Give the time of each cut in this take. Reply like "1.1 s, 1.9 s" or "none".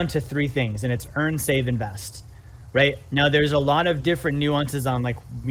none